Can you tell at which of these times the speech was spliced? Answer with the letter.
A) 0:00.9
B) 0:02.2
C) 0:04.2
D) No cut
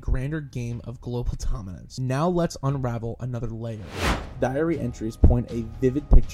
C